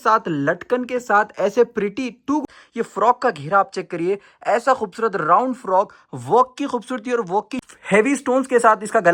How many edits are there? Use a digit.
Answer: 2